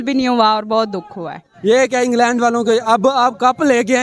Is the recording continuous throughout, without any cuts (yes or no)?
no